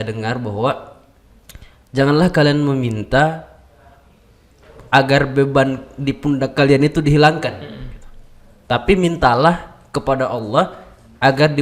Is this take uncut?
yes; 0 cuts

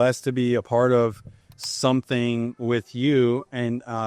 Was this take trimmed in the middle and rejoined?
no; 0 cuts

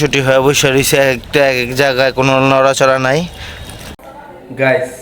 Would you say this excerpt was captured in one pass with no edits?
no; 1 cut; at 4.0 s

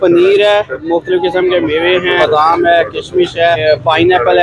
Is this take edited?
yes; 3 cuts; at 0.8 s, 2.2 s, 3.6 s

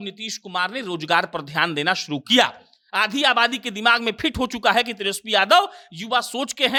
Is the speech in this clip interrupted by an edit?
no; 0 cuts

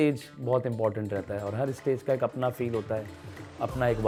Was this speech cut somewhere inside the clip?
no; 0 cuts

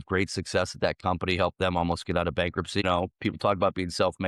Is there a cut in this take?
yes; 1 cut; at 2.8 s

